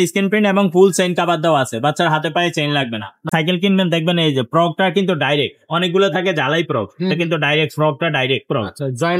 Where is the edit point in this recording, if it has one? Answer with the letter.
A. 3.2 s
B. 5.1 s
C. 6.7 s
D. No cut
A